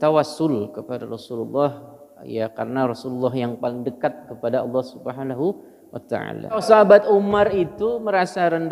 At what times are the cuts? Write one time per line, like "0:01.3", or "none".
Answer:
0:06.6